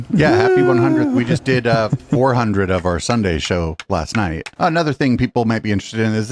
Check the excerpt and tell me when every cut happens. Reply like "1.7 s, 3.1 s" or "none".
4.5 s